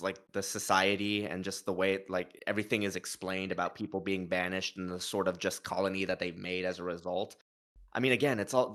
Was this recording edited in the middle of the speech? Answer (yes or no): no